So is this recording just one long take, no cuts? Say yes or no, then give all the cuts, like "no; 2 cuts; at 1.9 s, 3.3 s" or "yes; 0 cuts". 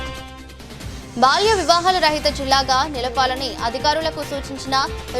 yes; 0 cuts